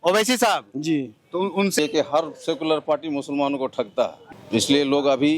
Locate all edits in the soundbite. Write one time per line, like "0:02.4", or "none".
0:01.8
0:04.2